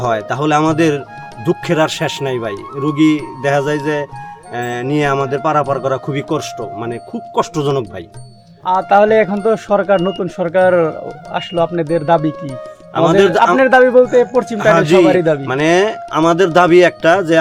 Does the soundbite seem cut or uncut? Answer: uncut